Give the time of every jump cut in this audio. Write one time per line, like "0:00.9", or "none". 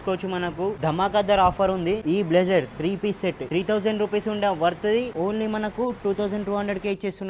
0:00.8
0:02.0
0:03.4
0:05.1